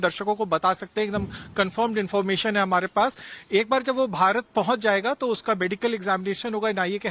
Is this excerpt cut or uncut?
uncut